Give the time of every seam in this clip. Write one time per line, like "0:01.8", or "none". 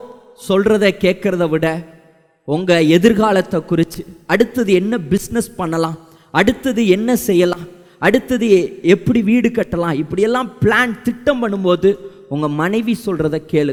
none